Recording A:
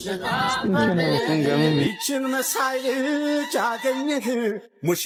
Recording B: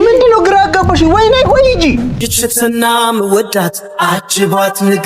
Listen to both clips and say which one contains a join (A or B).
B